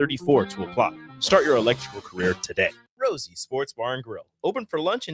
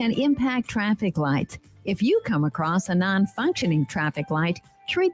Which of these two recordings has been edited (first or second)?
first